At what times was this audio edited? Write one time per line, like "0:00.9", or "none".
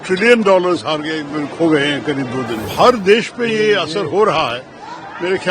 0:02.7